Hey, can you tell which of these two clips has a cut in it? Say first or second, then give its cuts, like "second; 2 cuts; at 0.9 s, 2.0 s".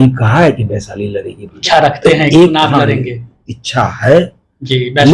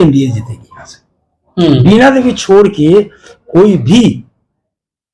first; 1 cut; at 1.5 s